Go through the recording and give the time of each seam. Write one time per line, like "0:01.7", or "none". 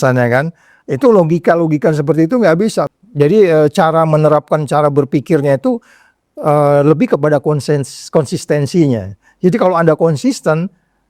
0:02.9